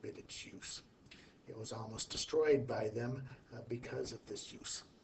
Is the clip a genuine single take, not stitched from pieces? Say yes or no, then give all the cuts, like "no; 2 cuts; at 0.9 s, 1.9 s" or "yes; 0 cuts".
yes; 0 cuts